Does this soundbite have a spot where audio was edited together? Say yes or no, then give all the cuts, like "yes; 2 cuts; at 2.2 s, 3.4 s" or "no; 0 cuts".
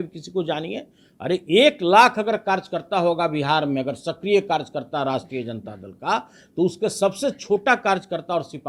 no; 0 cuts